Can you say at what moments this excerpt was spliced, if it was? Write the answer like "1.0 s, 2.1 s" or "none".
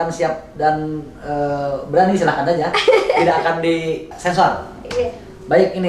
4.1 s